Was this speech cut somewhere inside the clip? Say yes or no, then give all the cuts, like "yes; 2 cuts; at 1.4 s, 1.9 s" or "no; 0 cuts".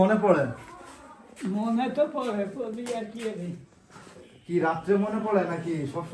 no; 0 cuts